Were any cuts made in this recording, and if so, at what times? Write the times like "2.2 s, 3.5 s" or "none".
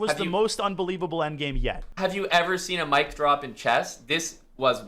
1.9 s